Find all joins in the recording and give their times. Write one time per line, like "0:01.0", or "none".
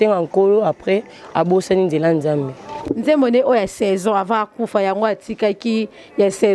0:02.9